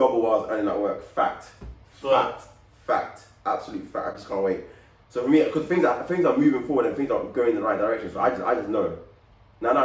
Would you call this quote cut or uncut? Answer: uncut